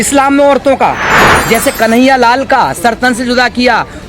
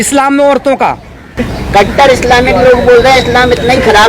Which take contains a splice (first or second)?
first